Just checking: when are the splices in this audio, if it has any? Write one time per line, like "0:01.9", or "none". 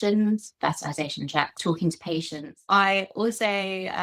0:01.6
0:02.6